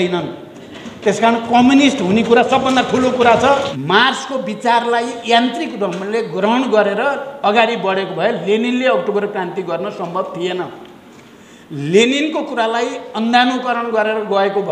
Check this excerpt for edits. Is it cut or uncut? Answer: cut